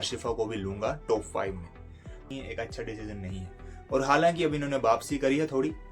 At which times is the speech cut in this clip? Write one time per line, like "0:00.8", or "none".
0:02.2